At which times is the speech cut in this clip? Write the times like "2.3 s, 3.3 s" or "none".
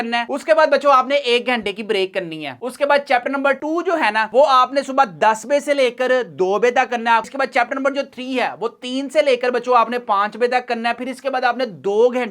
7.3 s

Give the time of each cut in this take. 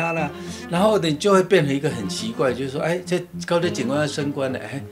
none

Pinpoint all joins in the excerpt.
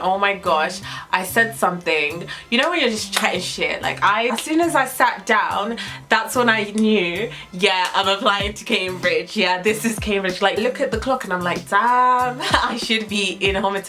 4.3 s, 10.6 s

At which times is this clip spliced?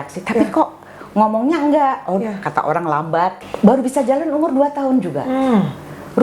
3.3 s

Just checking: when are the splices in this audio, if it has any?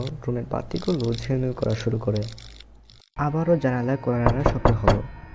3.1 s

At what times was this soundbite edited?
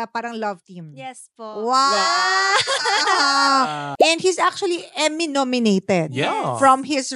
3.9 s

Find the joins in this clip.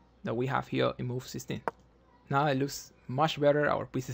1.6 s

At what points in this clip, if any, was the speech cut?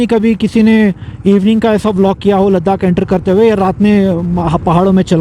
none

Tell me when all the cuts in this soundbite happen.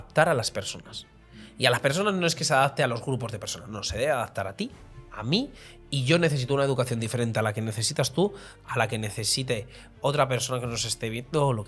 none

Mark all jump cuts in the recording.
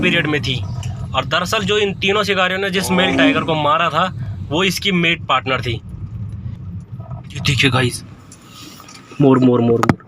7.4 s

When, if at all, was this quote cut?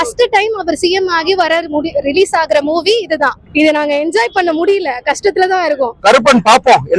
3.4 s, 5.9 s

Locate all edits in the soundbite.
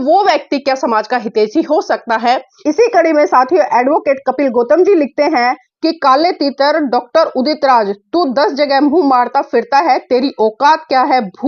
2.5 s

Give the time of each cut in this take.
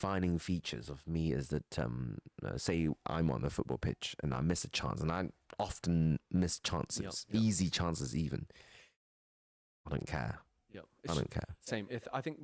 none

